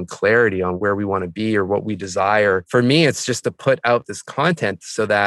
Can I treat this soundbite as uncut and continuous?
no; 3 cuts; at 0.8 s, 2.6 s, 4.2 s

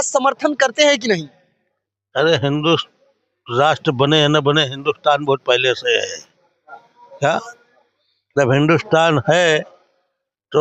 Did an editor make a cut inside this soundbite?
no; 0 cuts

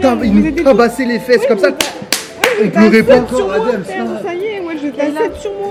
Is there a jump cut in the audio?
no; 0 cuts

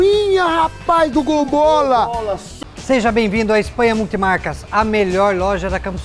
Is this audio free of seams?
no; 1 cut; at 2.4 s

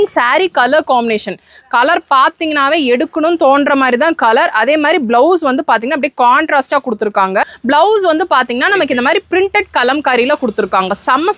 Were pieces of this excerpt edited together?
yes; 1 cut; at 7.5 s

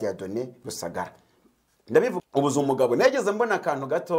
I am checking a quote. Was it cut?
yes; 1 cut; at 2.2 s

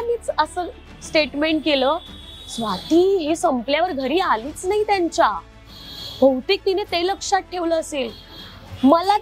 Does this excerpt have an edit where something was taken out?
no; 0 cuts

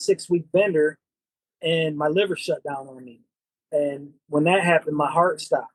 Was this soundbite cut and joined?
no; 0 cuts

